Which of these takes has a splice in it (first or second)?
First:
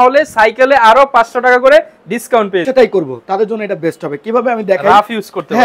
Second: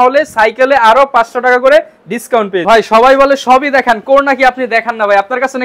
first